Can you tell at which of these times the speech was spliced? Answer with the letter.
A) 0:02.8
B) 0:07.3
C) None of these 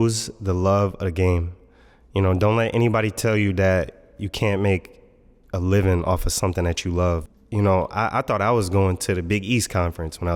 B